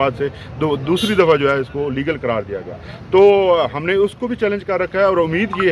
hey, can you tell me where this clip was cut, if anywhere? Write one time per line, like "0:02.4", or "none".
none